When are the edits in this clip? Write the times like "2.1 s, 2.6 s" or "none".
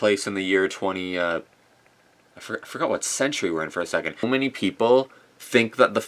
4.3 s